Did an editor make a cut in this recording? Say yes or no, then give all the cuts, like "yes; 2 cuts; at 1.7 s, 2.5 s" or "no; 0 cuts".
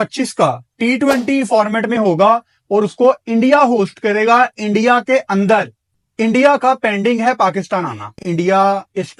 no; 0 cuts